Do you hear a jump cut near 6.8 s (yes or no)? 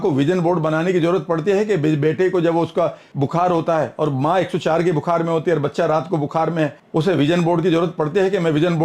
yes